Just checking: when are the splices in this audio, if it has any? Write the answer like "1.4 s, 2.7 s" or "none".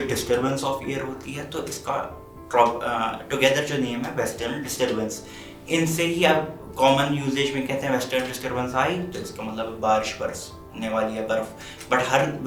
none